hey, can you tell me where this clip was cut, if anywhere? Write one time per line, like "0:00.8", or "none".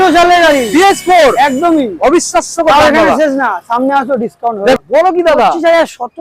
0:04.8